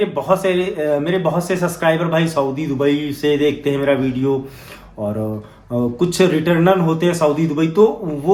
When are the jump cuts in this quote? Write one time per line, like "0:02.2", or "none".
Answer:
none